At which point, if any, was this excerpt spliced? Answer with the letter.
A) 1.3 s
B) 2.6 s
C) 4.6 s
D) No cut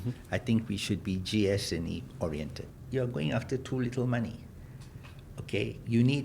B